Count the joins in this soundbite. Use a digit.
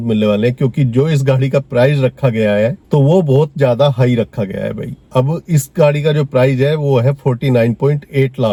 0